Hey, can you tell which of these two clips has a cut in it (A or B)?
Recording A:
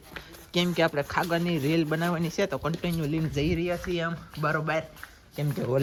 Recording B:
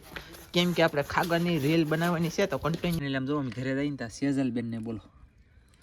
B